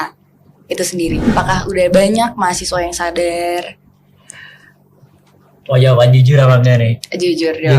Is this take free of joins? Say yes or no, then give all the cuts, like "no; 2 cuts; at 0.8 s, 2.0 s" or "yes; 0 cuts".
no; 1 cut; at 1.2 s